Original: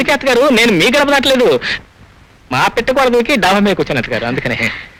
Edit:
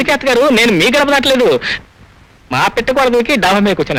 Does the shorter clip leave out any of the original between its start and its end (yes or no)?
no